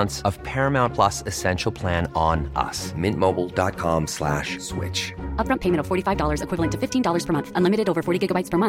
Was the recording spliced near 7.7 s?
no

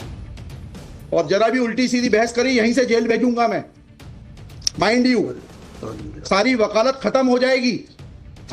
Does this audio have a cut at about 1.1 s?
yes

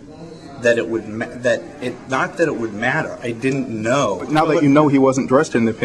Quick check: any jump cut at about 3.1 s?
no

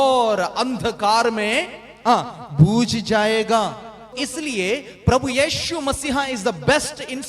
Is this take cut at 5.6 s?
no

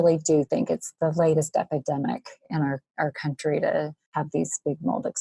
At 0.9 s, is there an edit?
no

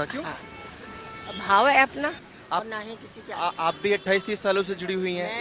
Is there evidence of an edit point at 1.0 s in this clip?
no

